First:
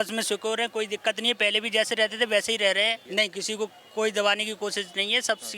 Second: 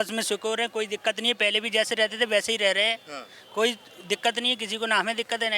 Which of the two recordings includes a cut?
first; 1 cut; at 3.0 s

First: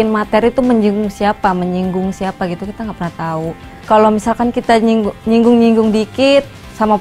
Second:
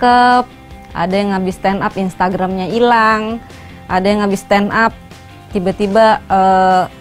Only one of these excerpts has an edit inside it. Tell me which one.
first; 1 cut; at 3.8 s

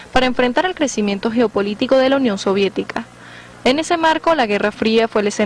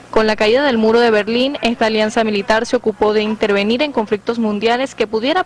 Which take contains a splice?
first; 1 cut; at 4.2 s

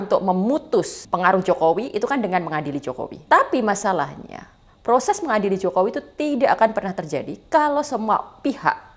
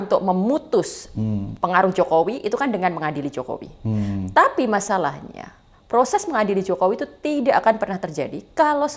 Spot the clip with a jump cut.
first; 2 cuts; at 1.0 s, 3.2 s

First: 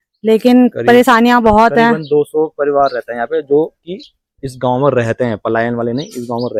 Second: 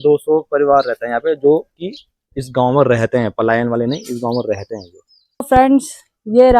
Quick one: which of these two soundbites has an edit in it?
second; 1 cut; at 5.5 s

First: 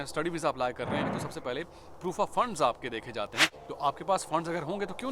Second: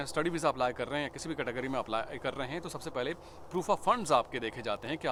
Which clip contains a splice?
first; 2 cuts; at 1.1 s, 3.5 s

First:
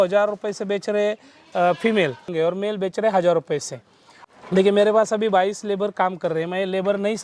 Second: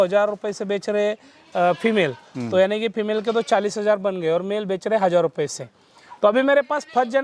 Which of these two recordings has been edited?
first; 2 cuts; at 2.3 s, 4.1 s

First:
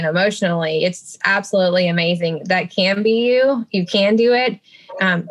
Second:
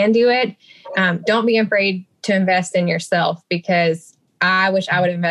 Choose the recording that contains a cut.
first; 1 cut; at 1.2 s

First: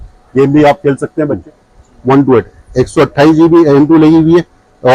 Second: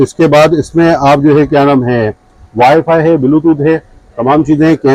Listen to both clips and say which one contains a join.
first; 1 cut; at 1.4 s

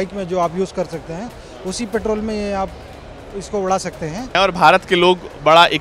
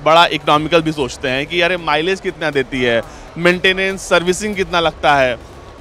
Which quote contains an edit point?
first; 1 cut; at 4.4 s

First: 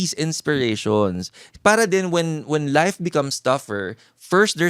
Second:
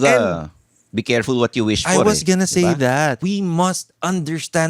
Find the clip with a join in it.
second; 1 cut; at 3.2 s

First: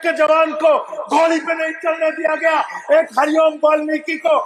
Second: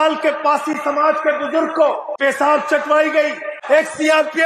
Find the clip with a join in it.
second; 2 cuts; at 2.1 s, 3.5 s

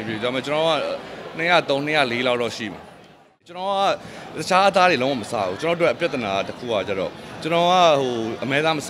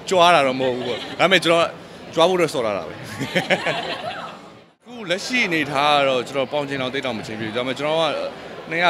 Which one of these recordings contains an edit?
first; 1 cut; at 3.5 s

